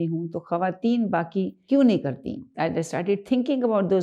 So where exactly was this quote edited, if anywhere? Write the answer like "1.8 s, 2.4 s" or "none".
1.6 s, 2.5 s